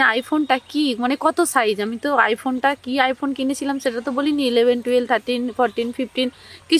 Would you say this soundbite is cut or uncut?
uncut